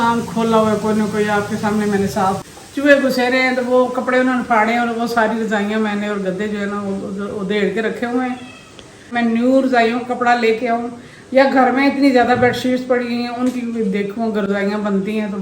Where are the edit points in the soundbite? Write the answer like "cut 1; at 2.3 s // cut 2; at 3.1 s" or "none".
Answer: cut 1; at 2.5 s // cut 2; at 9.1 s